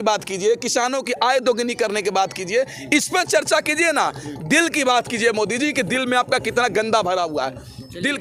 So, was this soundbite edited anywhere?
no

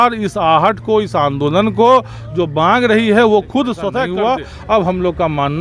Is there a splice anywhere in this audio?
yes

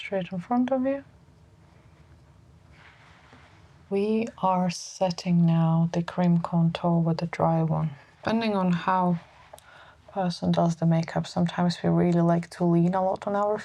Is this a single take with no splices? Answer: no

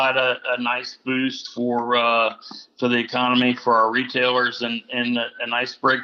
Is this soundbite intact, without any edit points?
yes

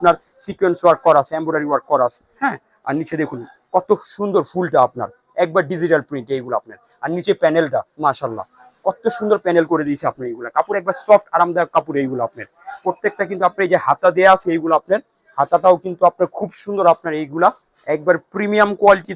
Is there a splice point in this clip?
no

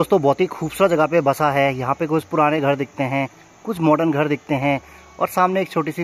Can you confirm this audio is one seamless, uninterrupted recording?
yes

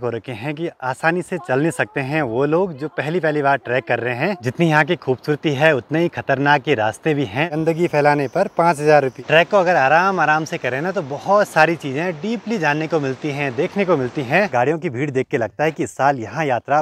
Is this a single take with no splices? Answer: no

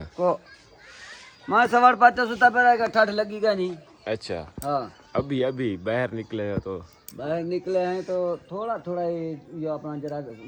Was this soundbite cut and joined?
no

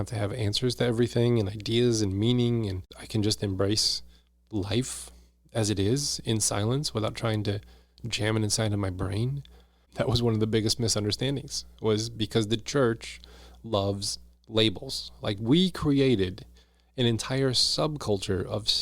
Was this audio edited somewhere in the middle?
yes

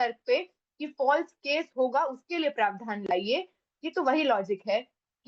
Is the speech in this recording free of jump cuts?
yes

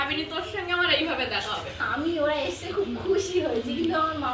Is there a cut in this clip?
yes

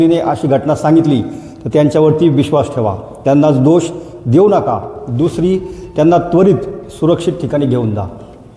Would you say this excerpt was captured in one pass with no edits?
yes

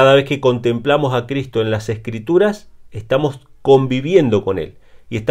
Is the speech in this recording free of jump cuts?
yes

